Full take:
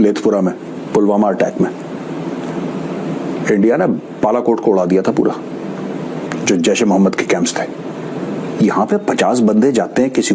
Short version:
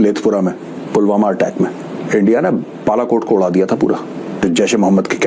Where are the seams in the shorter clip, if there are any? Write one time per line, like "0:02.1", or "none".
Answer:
0:02.0
0:04.4